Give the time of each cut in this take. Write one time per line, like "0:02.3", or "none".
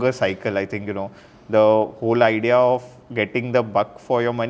none